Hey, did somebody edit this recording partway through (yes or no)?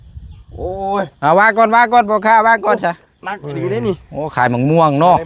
no